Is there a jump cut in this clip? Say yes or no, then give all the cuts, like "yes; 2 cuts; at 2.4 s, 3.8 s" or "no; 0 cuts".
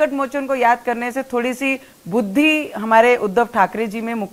no; 0 cuts